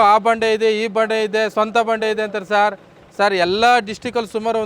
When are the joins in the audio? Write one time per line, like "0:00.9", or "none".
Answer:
none